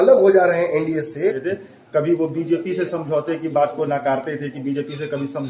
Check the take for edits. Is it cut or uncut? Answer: cut